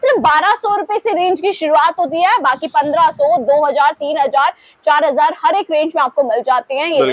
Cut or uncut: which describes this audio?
uncut